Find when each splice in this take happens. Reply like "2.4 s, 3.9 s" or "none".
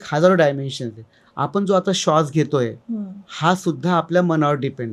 none